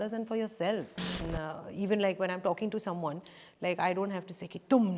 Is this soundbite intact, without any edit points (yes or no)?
no